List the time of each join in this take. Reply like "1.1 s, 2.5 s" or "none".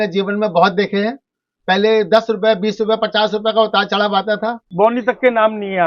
4.7 s

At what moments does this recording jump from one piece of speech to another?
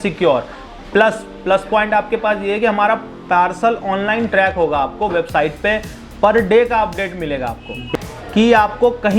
7.8 s

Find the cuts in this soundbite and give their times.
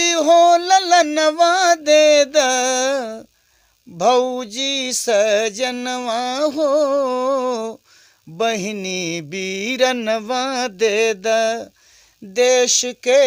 none

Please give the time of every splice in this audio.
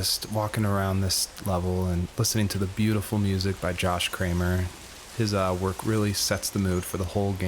2.8 s

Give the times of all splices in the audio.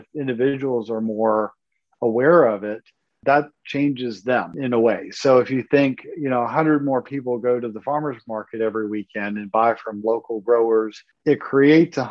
11.0 s

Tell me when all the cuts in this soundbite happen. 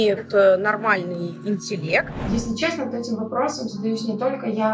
2.2 s

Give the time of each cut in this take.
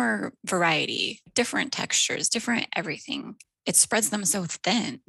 1.2 s, 3.5 s

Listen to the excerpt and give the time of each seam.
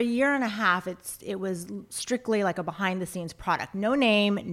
none

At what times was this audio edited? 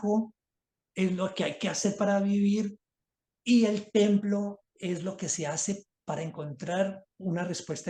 none

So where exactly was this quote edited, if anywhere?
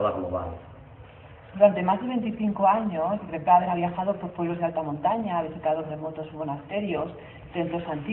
none

